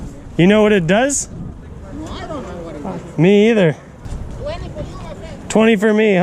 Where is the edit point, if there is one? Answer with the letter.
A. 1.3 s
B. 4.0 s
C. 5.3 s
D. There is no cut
B